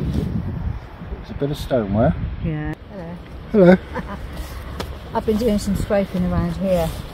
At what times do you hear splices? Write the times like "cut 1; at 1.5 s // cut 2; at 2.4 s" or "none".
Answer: cut 1; at 2.7 s

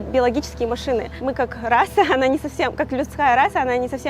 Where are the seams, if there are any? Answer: cut 1; at 1.1 s

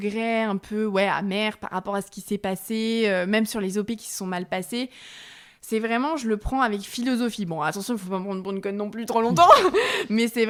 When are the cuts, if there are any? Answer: none

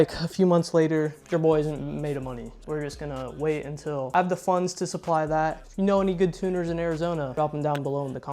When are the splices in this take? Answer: cut 1; at 1.2 s // cut 2; at 2.5 s // cut 3; at 4.1 s // cut 4; at 5.6 s // cut 5; at 7.3 s

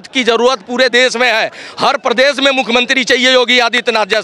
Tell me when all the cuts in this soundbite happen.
none

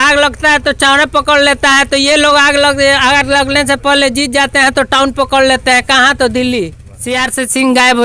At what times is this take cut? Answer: cut 1; at 6.9 s

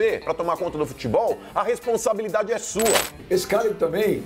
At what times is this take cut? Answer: cut 1; at 3.2 s

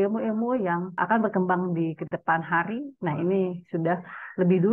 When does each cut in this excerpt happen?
cut 1; at 0.9 s

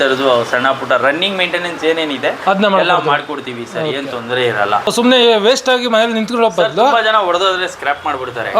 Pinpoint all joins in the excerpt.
cut 1; at 4.9 s

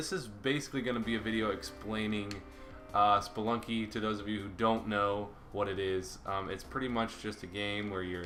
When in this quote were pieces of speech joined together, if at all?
none

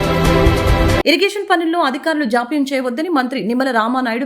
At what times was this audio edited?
cut 1; at 1.0 s

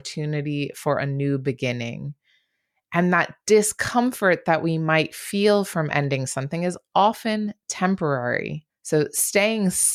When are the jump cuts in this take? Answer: none

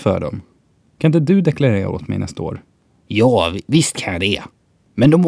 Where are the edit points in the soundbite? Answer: cut 1; at 2.8 s

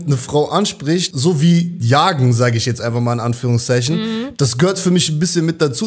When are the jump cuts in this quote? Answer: cut 1; at 1.1 s

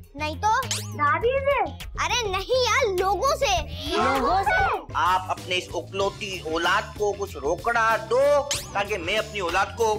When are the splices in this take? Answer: cut 1; at 4.9 s

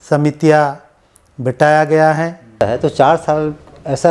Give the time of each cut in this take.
cut 1; at 2.6 s

